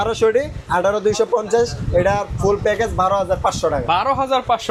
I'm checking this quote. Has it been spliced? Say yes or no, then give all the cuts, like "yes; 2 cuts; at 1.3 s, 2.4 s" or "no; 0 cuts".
no; 0 cuts